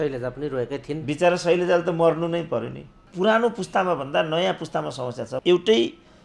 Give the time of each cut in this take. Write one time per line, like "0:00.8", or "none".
0:03.0
0:05.3